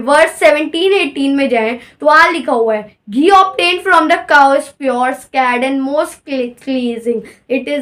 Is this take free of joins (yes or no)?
yes